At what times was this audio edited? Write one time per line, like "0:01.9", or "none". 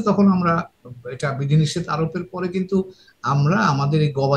none